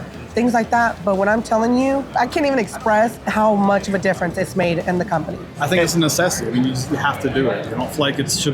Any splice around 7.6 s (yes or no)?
yes